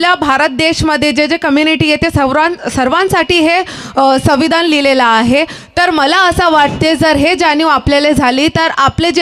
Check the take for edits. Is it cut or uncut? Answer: uncut